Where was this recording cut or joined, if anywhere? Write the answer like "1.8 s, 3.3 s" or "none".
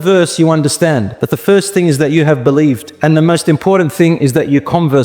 1.1 s, 2.9 s